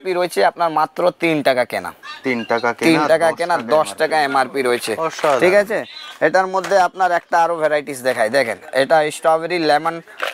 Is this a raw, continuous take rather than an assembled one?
yes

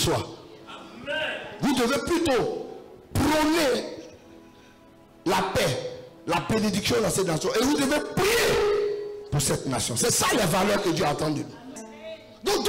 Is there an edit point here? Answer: yes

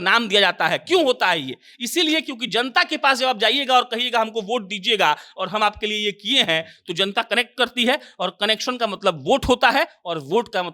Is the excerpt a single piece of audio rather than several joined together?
yes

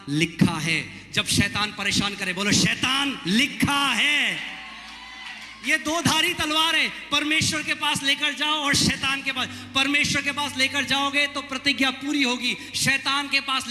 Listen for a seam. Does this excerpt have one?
no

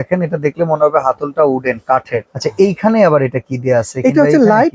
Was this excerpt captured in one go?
yes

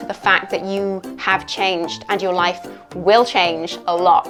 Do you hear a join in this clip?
no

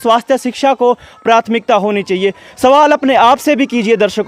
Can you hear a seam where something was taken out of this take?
no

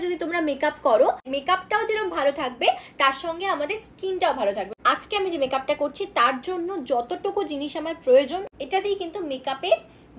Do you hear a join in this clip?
yes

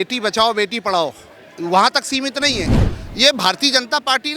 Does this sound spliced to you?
yes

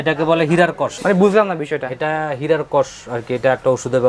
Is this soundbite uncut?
yes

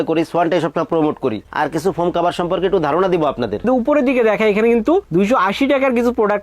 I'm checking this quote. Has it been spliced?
yes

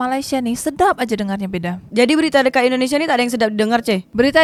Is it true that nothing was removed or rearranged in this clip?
yes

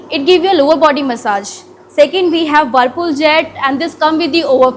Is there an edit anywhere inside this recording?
no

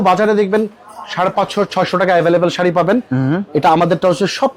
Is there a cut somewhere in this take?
no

